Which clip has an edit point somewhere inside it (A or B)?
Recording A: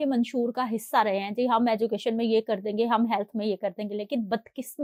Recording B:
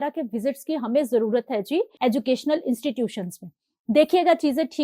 B